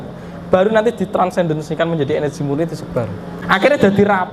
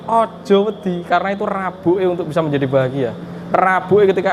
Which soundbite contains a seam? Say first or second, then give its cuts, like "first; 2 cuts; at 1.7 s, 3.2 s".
first; 1 cut; at 3.4 s